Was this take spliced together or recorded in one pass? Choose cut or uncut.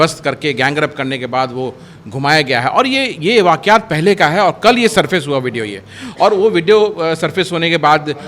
uncut